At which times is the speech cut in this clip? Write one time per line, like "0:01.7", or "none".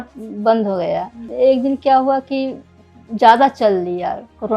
0:01.2